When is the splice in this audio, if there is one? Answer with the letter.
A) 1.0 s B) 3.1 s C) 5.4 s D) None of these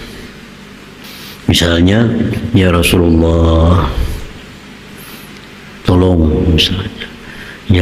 A